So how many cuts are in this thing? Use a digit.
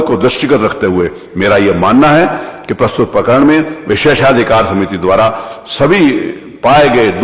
0